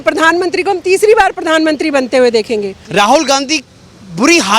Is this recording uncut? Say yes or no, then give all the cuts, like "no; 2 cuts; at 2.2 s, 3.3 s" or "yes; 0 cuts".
no; 1 cut; at 2.8 s